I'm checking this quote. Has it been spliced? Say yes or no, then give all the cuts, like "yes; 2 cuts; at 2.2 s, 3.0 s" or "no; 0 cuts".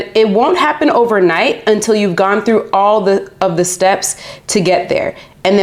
no; 0 cuts